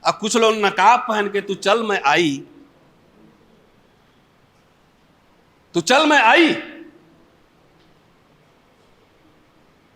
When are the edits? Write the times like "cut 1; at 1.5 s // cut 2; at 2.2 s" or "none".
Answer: none